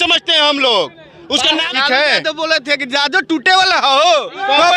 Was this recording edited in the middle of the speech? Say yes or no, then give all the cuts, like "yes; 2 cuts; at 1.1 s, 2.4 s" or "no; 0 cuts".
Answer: yes; 1 cut; at 1.7 s